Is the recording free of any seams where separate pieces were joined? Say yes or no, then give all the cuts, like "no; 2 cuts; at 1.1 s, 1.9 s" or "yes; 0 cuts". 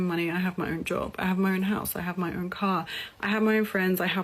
no; 1 cut; at 3.0 s